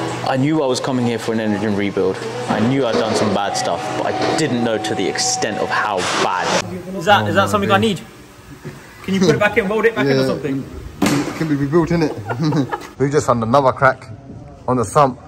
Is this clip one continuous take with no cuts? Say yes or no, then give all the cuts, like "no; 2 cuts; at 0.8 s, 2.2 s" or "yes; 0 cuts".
no; 2 cuts; at 6.6 s, 12.9 s